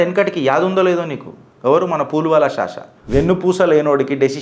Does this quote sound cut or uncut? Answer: cut